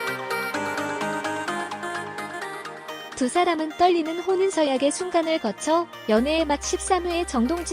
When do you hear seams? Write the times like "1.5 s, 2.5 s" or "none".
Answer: 3.0 s